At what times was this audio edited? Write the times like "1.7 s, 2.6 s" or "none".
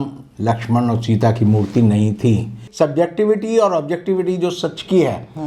2.6 s